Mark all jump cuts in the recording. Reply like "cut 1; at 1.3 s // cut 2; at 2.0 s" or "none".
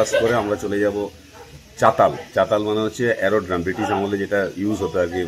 none